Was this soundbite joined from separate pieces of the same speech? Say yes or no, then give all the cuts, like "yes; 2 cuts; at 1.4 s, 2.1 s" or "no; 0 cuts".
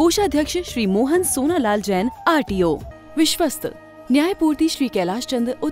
yes; 1 cut; at 2.9 s